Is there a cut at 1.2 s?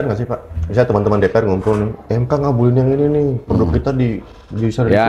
no; 0 cuts

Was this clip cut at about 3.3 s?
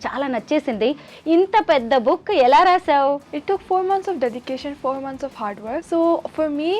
yes; 2 cuts; at 3.3 s, 5.8 s

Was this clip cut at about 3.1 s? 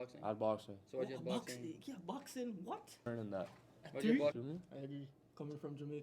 yes; 3 cuts; at 3.1 s, 3.7 s, 4.3 s

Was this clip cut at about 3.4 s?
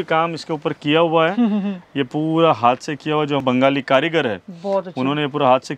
yes; 1 cut; at 3.4 s

